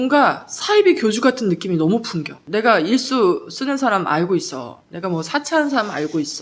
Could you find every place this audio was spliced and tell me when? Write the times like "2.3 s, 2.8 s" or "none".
2.4 s